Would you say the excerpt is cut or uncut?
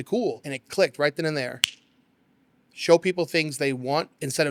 uncut